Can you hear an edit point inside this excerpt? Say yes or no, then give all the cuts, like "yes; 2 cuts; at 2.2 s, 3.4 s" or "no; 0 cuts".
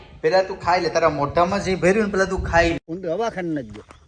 yes; 1 cut; at 2.9 s